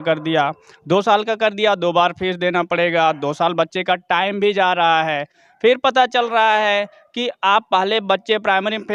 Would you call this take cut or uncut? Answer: uncut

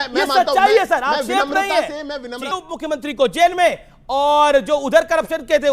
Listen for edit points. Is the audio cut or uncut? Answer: cut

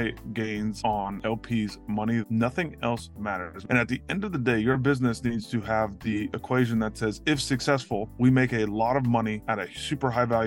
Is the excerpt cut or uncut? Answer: cut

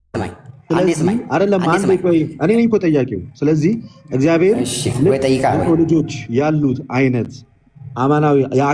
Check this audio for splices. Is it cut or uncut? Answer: uncut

